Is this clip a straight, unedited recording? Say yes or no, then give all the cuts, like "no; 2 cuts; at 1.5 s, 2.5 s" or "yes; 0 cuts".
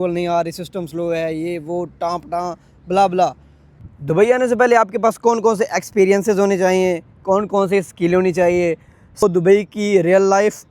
no; 2 cuts; at 3.7 s, 9.2 s